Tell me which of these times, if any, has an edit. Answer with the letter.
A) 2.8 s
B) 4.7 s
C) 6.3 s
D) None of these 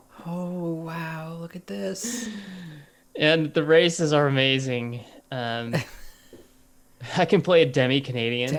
D